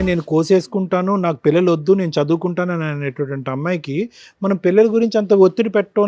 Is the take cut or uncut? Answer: uncut